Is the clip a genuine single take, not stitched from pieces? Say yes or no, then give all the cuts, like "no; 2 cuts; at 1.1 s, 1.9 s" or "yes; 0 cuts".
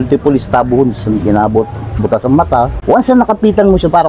no; 1 cut; at 2.7 s